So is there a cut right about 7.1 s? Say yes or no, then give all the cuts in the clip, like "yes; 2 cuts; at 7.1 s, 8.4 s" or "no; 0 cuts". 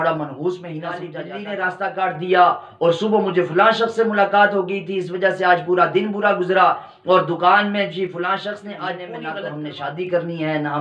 no; 2 cuts; at 1.1 s, 9.2 s